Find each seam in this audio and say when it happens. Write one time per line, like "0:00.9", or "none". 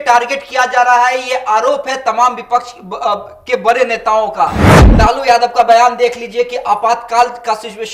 0:04.7